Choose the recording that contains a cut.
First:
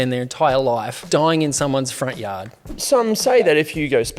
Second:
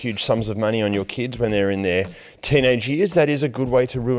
first; 2 cuts; at 1.0 s, 2.8 s

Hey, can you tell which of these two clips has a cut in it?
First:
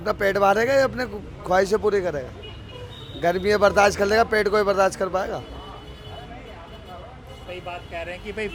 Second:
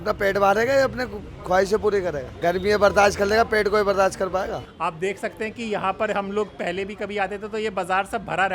second; 2 cuts; at 2.3 s, 4.7 s

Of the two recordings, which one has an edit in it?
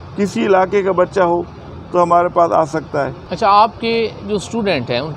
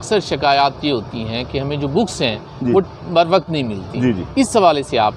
first; 1 cut; at 3.2 s

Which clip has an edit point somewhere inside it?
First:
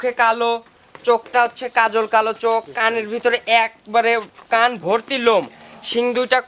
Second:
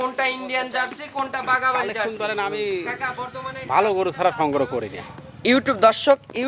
second; 1 cut; at 2.1 s

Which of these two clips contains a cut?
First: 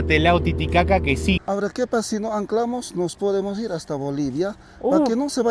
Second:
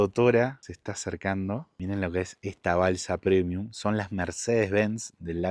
first; 1 cut; at 1.4 s

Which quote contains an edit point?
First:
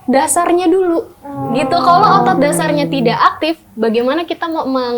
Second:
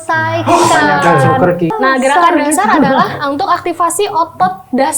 second; 1 cut; at 1.7 s

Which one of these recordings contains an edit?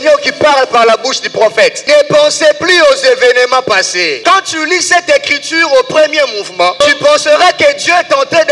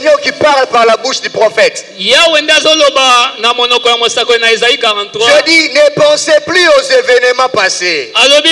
first; 3 cuts; at 1.8 s, 4.2 s, 6.8 s

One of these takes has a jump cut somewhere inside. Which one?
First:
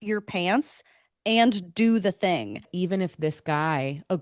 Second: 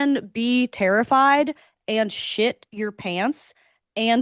first; 1 cut; at 2.7 s

